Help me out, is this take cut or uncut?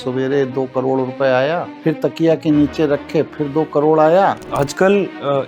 cut